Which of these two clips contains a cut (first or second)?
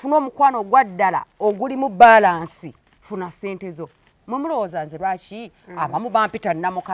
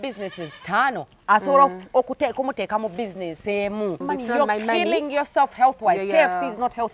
second